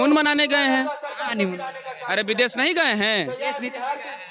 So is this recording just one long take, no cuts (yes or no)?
yes